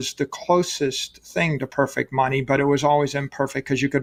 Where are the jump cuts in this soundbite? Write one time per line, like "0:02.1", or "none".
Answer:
none